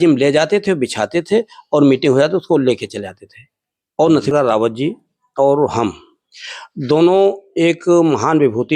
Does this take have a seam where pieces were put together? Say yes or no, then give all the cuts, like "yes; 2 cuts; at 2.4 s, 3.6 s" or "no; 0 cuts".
yes; 1 cut; at 4.3 s